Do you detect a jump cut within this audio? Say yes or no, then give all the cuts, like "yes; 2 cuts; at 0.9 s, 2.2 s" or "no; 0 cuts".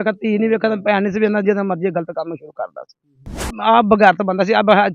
yes; 1 cut; at 3.6 s